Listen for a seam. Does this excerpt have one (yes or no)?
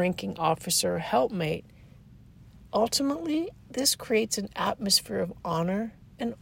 no